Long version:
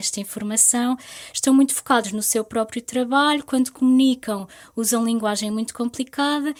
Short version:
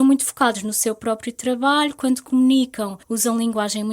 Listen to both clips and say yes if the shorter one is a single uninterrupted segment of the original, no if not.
no